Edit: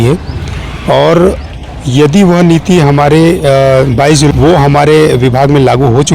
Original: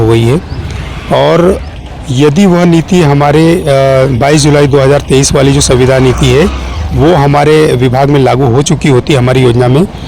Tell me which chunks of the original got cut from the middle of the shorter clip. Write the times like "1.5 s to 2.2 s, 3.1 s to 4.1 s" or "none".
4.5 s to 6.9 s